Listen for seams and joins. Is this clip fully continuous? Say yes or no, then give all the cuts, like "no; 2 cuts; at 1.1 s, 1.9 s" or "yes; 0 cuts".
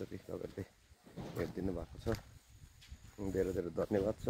yes; 0 cuts